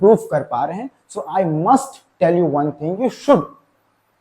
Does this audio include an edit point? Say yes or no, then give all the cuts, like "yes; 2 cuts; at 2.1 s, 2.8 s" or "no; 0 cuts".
yes; 1 cut; at 3.0 s